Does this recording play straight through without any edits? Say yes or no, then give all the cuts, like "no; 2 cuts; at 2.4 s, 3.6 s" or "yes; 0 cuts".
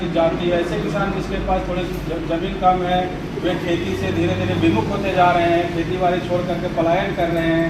yes; 0 cuts